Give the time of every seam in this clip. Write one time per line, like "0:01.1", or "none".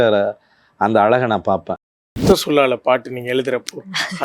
0:02.0